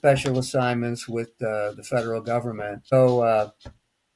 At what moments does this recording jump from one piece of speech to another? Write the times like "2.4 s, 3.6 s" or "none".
2.9 s